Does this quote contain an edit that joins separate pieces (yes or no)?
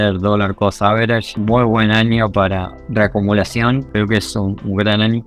yes